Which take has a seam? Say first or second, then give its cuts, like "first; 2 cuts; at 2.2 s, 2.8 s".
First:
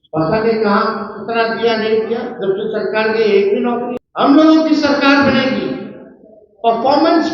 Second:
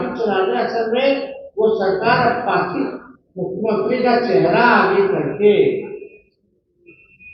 first; 1 cut; at 4.0 s